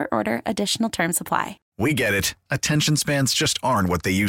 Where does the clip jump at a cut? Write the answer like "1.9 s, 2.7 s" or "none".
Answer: 1.6 s